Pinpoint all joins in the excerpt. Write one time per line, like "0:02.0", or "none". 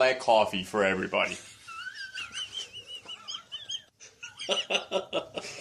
none